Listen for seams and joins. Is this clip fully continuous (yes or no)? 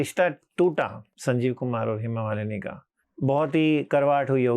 no